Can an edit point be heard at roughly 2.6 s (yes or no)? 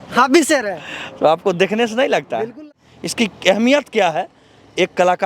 yes